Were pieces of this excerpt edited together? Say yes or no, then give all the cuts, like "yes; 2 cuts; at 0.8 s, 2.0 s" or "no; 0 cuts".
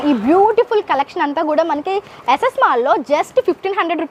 no; 0 cuts